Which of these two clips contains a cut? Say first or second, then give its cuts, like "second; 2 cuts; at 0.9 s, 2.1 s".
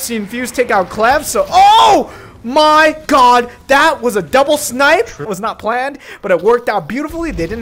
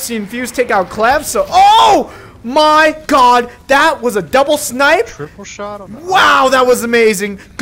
first; 1 cut; at 5.3 s